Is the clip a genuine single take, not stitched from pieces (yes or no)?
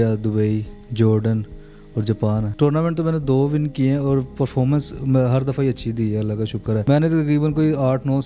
no